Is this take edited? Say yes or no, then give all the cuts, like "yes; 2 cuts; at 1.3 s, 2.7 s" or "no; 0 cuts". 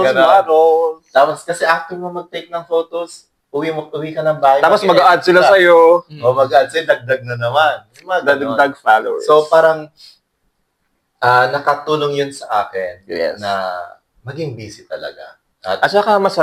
no; 0 cuts